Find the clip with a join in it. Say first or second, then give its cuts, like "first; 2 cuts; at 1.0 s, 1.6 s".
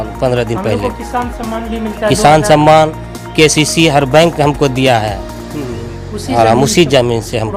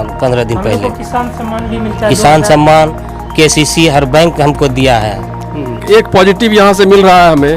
second; 1 cut; at 5.8 s